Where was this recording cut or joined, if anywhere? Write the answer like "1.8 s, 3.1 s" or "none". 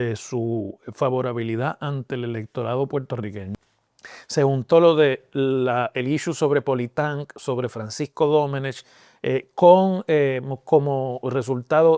3.5 s